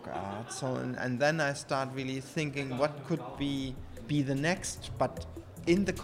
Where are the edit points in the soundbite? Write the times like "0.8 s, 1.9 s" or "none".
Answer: none